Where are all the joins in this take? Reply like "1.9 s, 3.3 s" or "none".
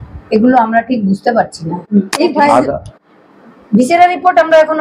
none